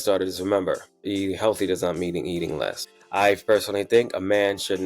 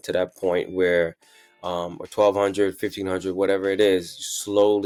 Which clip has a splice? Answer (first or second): first